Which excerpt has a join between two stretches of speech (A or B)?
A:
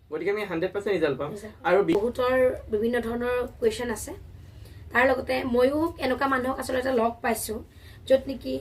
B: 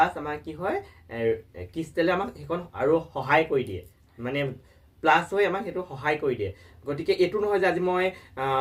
A